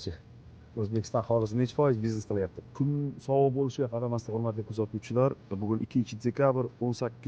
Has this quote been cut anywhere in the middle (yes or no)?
yes